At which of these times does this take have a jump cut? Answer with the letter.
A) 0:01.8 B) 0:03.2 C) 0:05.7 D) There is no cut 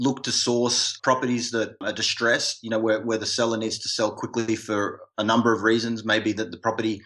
A